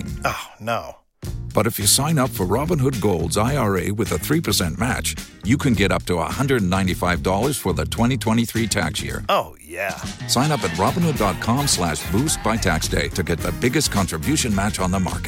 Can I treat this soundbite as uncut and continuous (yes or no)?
yes